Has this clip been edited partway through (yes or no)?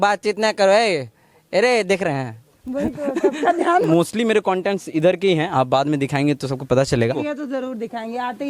yes